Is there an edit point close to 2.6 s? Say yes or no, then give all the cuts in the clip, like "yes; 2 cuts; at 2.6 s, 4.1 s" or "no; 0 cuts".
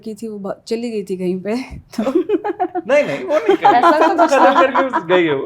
no; 0 cuts